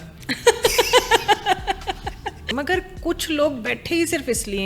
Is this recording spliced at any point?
yes; 1 cut; at 2.4 s

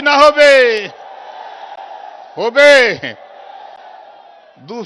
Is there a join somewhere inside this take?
no; 0 cuts

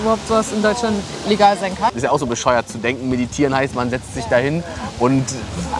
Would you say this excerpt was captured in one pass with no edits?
no; 1 cut; at 1.9 s

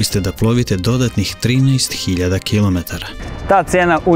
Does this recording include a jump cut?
yes; 1 cut; at 3.3 s

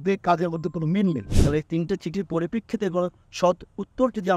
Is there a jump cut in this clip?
yes; 1 cut; at 1.3 s

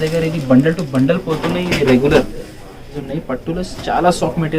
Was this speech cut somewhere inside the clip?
yes; 1 cut; at 3.0 s

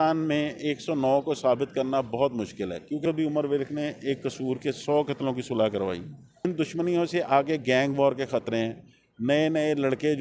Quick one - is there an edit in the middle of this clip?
yes; 2 cuts; at 3.0 s, 6.5 s

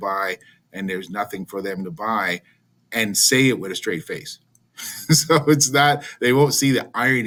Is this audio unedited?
yes; 0 cuts

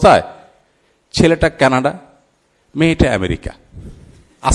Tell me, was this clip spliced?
no; 0 cuts

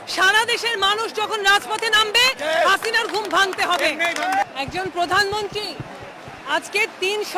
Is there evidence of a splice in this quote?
no; 0 cuts

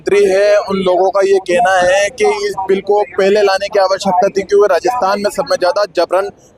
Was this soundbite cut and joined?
no; 0 cuts

